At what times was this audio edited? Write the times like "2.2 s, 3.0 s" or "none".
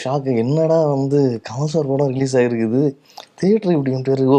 none